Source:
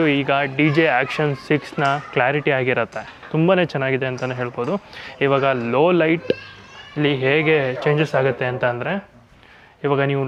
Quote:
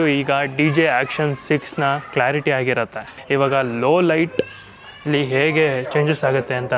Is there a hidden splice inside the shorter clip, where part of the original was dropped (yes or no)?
yes